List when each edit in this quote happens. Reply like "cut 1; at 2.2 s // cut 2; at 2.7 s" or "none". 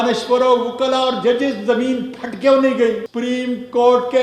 cut 1; at 3.1 s